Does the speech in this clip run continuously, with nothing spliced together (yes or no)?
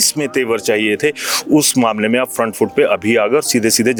yes